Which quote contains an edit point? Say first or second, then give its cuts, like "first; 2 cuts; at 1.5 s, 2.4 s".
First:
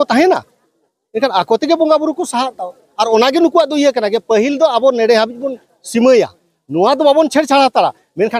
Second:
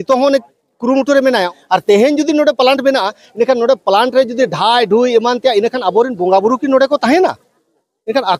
second; 1 cut; at 1.5 s